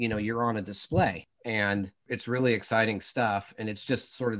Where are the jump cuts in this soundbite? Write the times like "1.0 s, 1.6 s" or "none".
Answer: 1.3 s, 2.0 s